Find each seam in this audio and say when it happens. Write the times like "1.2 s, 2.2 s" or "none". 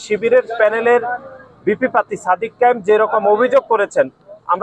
none